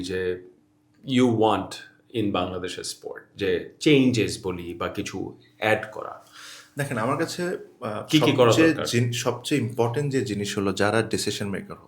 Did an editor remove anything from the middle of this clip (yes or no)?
no